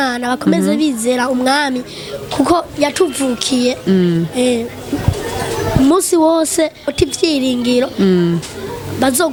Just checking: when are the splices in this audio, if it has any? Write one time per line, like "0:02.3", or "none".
none

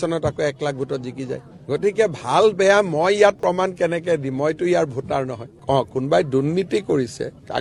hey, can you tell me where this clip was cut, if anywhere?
none

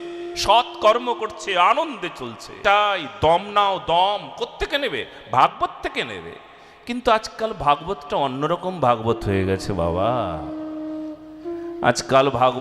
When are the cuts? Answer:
0:02.6

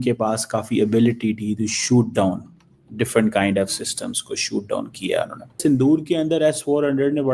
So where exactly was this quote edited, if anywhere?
0:05.6

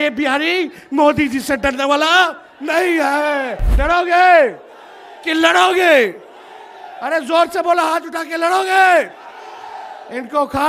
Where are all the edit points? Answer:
0:03.6

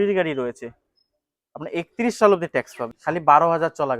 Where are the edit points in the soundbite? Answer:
0:03.0

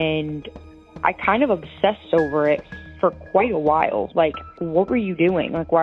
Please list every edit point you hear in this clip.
0:04.5

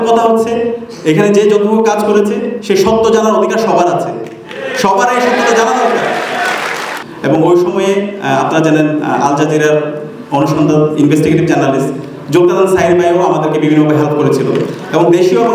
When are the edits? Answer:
0:07.0

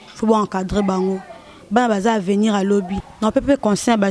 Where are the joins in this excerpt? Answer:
0:03.0

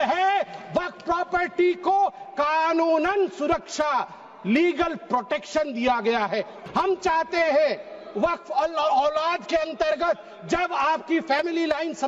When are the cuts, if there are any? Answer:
0:06.6

